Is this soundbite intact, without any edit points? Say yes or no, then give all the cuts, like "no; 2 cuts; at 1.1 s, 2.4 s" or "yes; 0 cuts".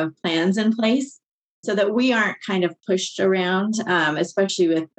yes; 0 cuts